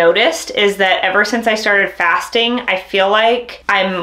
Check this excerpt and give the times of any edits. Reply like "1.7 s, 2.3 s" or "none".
none